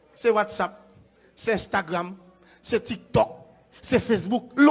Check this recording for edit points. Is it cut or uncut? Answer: uncut